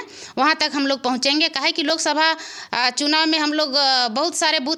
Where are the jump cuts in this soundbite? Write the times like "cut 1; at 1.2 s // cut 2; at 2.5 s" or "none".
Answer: none